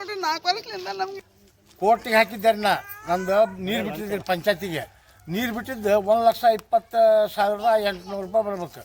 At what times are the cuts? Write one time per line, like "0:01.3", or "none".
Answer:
0:01.3